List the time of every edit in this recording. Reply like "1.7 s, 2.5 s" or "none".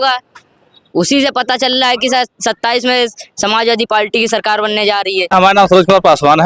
5.3 s